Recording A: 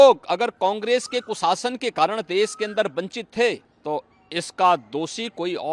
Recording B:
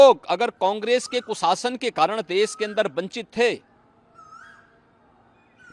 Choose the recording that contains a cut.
A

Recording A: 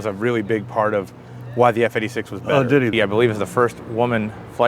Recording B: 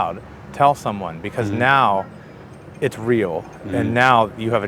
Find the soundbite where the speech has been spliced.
A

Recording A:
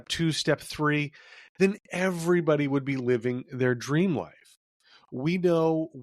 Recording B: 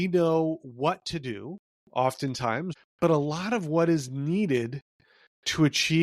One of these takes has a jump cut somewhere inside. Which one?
B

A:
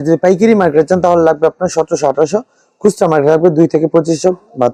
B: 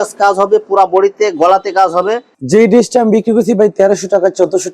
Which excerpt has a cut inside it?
B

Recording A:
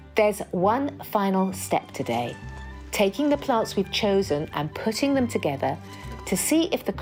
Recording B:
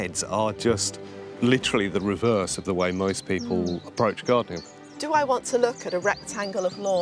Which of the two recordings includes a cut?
B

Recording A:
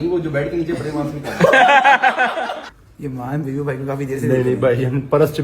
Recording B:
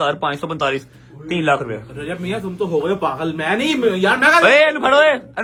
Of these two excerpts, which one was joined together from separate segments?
A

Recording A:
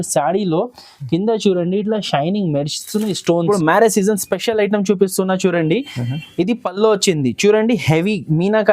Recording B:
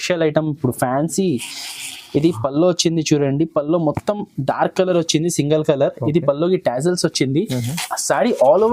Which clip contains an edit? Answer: A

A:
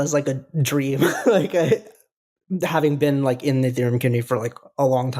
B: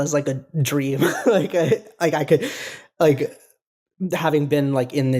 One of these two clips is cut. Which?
A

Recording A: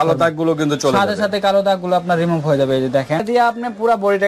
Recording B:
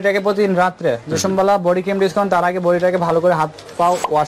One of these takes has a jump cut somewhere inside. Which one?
A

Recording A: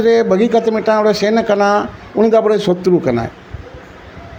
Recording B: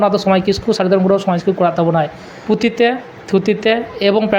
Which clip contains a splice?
B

